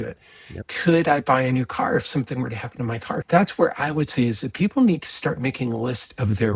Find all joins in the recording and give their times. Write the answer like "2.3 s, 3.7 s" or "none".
3.2 s